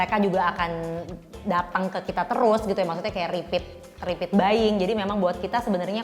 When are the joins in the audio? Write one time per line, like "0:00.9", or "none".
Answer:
none